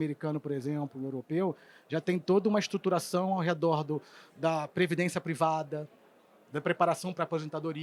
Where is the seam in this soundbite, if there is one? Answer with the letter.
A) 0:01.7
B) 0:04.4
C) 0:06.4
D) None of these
D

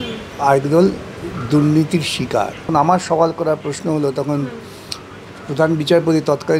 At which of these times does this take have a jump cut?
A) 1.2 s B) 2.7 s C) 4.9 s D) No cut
B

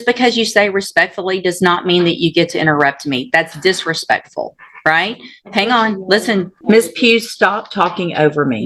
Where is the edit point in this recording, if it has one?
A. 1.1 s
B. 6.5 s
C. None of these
B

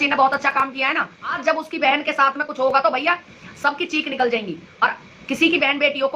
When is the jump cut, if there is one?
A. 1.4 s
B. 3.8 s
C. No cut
A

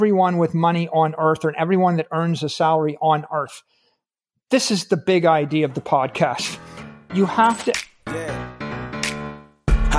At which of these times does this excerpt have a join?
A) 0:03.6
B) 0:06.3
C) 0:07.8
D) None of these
C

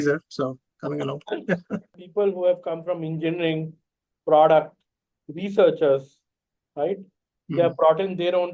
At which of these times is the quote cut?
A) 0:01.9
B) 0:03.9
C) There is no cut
A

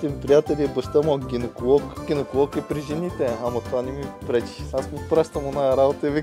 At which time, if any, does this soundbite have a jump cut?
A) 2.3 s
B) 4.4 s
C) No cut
C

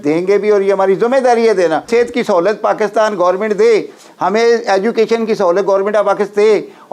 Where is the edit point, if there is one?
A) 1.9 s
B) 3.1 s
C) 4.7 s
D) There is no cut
A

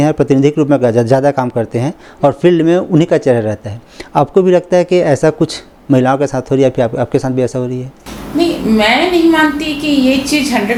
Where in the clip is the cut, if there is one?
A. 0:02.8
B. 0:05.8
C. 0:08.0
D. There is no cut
D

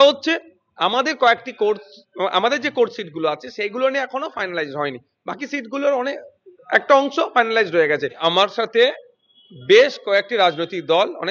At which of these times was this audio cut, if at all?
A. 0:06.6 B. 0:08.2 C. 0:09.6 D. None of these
B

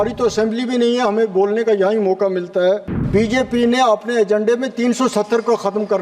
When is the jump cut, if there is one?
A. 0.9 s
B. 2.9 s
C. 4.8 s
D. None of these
B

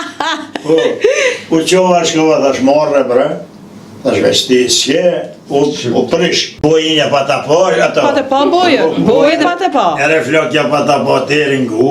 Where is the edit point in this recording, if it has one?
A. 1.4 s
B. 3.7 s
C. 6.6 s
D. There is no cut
C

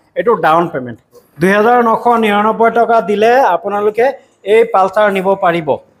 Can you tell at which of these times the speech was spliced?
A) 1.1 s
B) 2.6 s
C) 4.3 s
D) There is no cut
A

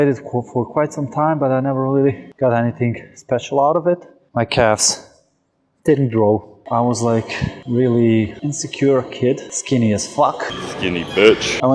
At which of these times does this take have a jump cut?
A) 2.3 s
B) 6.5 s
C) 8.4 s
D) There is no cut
B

